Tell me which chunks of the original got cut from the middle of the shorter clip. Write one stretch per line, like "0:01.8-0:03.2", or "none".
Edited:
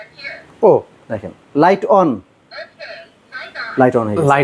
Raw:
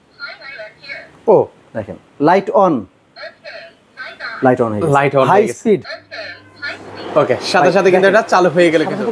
none